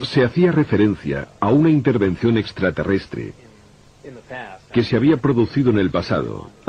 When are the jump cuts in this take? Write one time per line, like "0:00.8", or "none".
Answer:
none